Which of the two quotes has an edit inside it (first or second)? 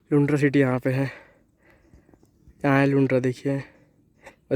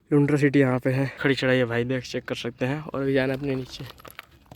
second